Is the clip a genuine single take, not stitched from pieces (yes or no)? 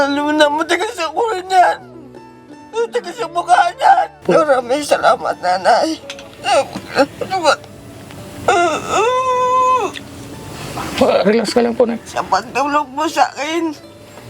no